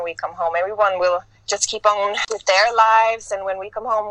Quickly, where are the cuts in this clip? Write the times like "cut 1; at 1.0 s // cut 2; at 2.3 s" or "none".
cut 1; at 2.2 s